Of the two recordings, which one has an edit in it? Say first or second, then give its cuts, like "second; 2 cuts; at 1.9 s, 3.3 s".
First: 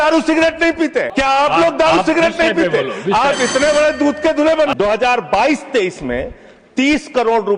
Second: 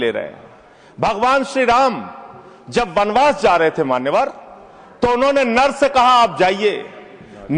first; 2 cuts; at 1.1 s, 4.7 s